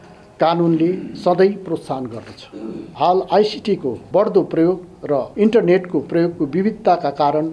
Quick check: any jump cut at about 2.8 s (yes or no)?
yes